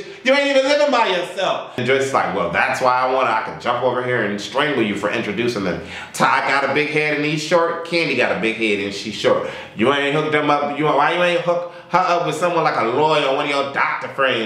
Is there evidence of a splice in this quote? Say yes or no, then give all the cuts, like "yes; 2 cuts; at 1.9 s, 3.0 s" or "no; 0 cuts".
yes; 1 cut; at 1.8 s